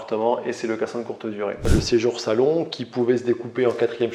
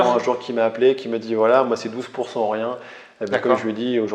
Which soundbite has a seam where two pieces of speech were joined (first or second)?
first